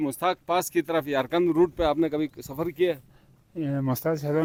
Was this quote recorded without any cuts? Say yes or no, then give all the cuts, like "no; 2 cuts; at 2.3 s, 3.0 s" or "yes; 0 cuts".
yes; 0 cuts